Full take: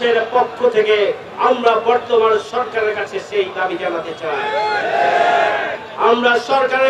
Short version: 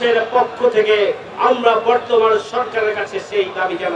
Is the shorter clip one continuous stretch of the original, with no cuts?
yes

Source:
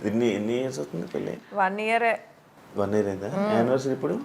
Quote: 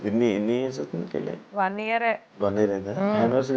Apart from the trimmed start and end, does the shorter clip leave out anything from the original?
yes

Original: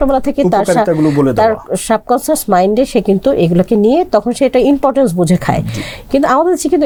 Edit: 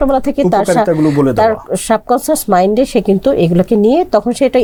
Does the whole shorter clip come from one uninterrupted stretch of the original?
yes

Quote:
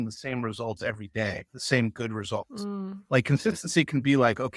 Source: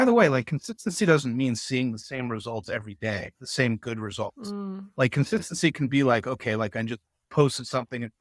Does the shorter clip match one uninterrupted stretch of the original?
yes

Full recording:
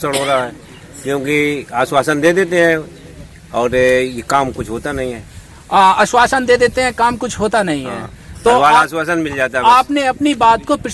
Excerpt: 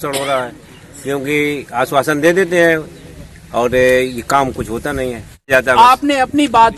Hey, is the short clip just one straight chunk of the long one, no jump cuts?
no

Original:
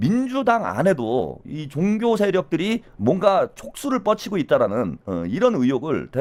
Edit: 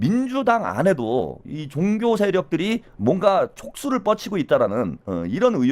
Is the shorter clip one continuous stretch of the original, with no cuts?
yes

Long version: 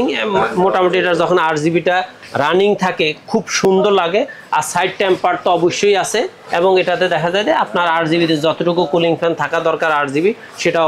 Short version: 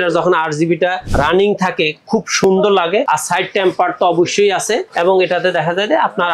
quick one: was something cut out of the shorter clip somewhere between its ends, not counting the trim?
yes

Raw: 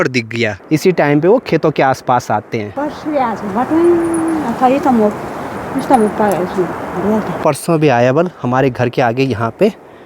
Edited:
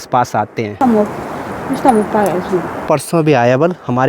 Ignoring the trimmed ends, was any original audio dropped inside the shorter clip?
yes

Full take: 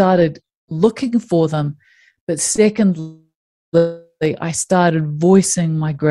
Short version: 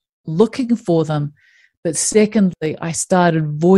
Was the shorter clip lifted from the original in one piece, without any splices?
no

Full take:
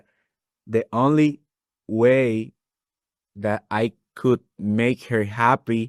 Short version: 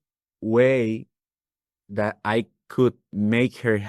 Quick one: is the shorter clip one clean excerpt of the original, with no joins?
yes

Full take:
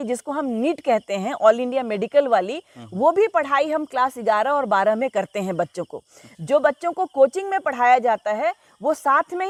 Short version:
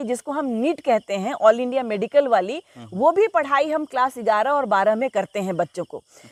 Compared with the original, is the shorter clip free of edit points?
yes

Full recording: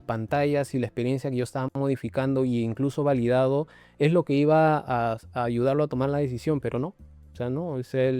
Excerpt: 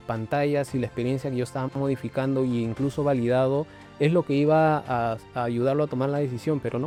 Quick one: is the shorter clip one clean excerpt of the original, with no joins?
yes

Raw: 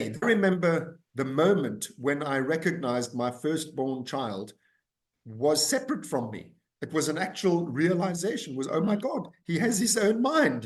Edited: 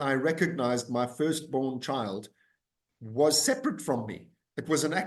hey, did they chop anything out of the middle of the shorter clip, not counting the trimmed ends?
no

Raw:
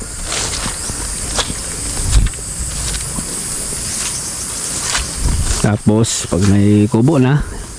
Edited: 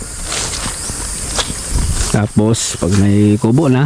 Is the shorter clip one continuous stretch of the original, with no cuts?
no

